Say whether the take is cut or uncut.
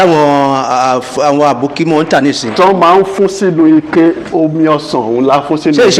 uncut